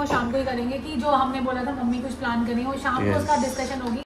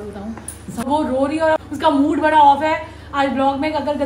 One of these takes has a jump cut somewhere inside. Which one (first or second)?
second